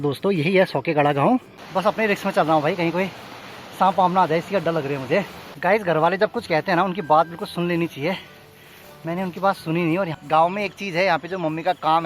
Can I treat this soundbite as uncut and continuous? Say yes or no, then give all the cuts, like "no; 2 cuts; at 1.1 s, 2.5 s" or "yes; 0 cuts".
no; 3 cuts; at 1.6 s, 5.4 s, 10.2 s